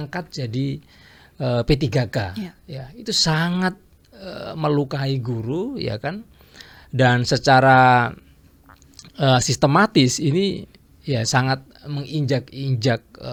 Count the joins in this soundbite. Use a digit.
0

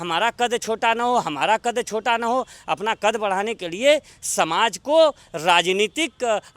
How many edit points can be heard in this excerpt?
0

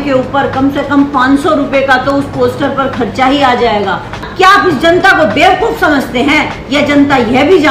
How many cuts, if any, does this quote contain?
1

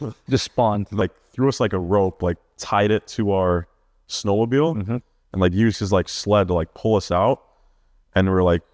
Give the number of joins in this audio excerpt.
1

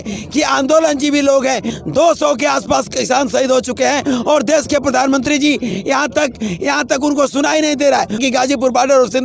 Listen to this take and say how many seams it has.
2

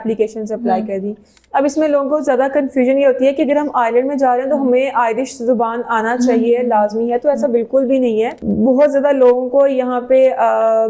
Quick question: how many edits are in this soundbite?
2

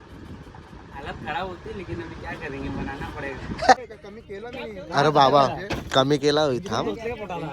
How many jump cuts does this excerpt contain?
1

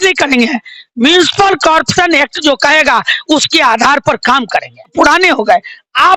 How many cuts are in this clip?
1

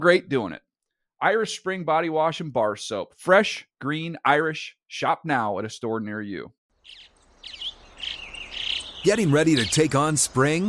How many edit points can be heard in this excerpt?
1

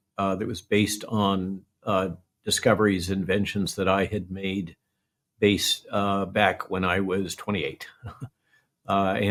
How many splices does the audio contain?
0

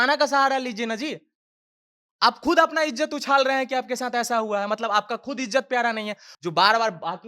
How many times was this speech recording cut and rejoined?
1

